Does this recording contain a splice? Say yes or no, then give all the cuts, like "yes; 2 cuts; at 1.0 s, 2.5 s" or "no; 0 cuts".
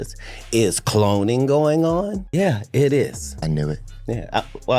yes; 2 cuts; at 2.2 s, 3.3 s